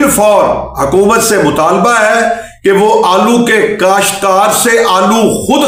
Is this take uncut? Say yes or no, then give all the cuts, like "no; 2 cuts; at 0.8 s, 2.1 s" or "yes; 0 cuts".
yes; 0 cuts